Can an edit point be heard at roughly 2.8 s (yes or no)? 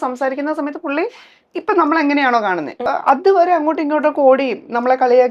yes